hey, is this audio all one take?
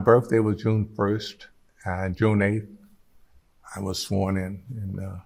yes; 0 cuts

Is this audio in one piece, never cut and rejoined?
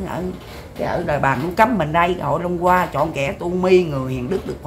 yes; 0 cuts

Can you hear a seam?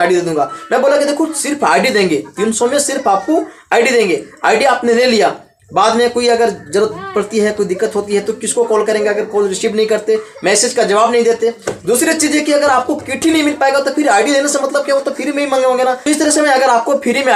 no; 0 cuts

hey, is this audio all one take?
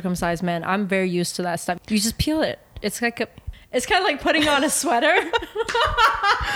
no; 2 cuts; at 1.8 s, 3.4 s

